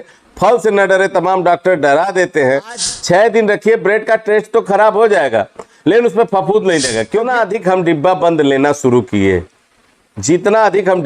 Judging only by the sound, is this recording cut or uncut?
cut